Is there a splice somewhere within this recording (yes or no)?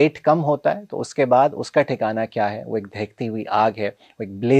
no